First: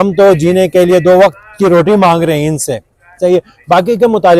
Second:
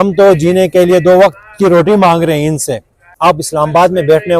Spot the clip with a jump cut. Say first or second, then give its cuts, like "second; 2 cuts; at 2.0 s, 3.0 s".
second; 1 cut; at 3.0 s